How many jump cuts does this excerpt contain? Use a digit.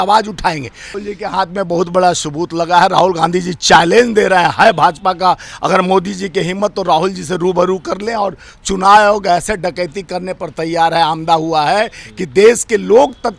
1